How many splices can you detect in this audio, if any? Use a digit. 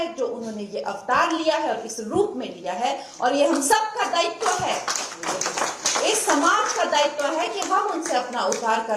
0